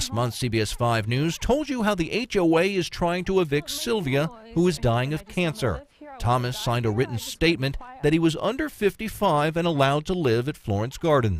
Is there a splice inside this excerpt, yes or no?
no